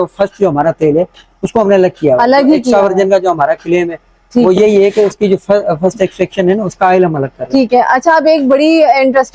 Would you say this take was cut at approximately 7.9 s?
no; 0 cuts

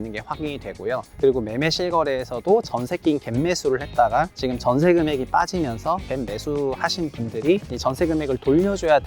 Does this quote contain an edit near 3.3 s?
no; 2 cuts; at 6.1 s, 7.7 s

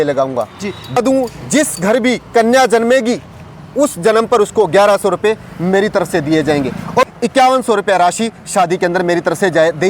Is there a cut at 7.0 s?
yes; 2 cuts; at 1.0 s, 7.0 s

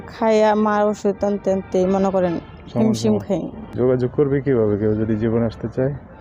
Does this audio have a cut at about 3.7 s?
yes; 1 cut; at 3.7 s

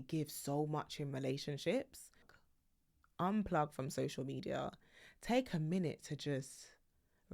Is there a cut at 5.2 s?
no; 1 cut; at 2.3 s

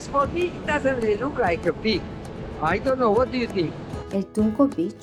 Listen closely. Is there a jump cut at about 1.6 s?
no; 0 cuts

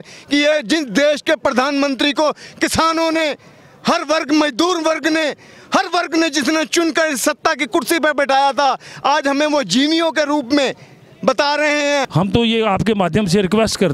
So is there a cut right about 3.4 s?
no; 1 cut; at 12.1 s

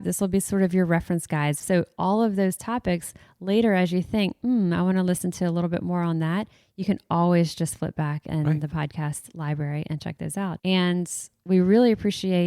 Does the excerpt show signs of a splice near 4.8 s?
no; 2 cuts; at 1.6 s, 10.6 s

